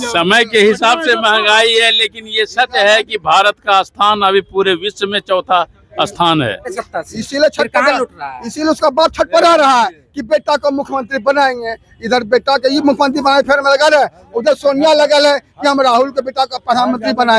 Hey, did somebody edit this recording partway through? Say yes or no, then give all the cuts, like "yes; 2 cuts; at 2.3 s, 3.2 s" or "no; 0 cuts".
yes; 1 cut; at 6.8 s